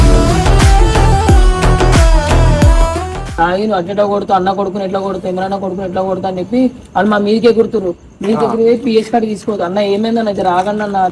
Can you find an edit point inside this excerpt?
yes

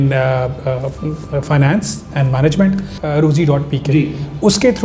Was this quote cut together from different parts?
yes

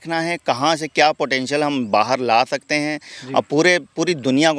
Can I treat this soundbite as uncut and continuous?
yes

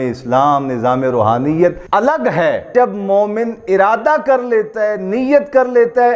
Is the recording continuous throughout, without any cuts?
no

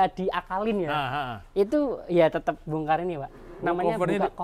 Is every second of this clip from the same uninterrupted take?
yes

